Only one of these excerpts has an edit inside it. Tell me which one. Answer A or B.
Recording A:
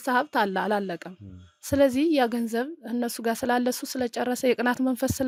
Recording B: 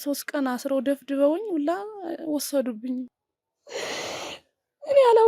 B